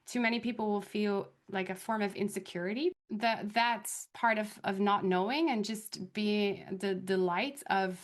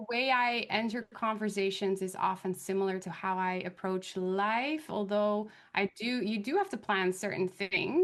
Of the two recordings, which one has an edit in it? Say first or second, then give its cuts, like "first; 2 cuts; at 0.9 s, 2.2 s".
first; 2 cuts; at 1.4 s, 3.0 s